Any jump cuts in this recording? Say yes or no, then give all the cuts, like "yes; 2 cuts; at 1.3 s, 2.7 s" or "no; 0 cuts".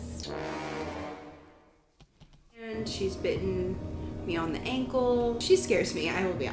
yes; 1 cut; at 2.7 s